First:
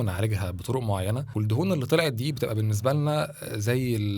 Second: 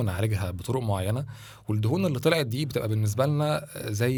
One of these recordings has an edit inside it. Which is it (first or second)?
first